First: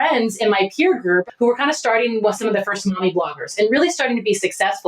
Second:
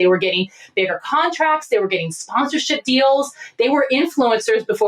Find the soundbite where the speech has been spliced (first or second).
first